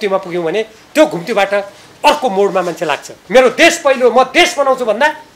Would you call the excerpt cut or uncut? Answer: cut